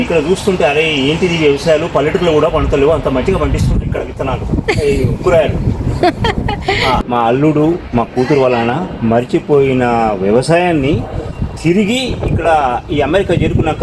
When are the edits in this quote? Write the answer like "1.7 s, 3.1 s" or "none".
7.0 s